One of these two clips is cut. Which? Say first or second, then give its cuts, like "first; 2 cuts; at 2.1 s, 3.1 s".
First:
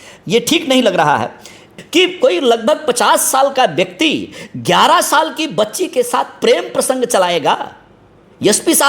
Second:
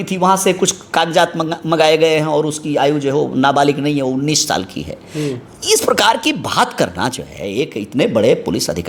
first; 1 cut; at 1.6 s